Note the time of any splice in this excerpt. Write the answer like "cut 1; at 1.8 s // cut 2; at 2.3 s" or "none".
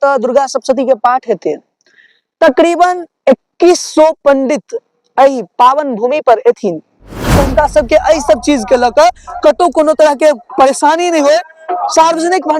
cut 1; at 7.3 s